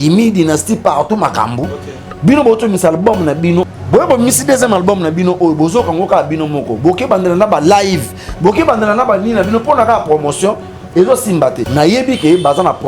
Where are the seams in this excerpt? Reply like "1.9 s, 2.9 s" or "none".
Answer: 3.7 s, 11.6 s